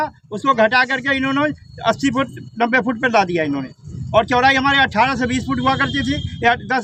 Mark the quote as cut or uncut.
uncut